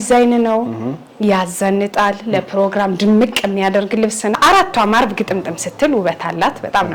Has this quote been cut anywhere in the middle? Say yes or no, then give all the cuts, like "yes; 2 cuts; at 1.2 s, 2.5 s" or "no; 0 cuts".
yes; 1 cut; at 4.4 s